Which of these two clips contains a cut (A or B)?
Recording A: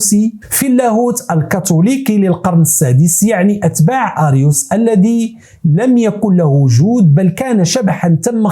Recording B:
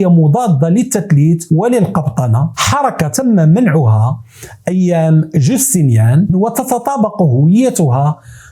B